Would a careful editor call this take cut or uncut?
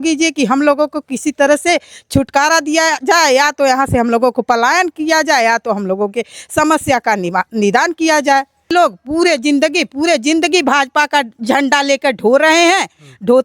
cut